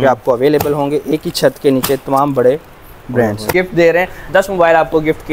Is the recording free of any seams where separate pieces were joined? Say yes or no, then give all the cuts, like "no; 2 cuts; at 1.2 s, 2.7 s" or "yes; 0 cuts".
no; 1 cut; at 3.5 s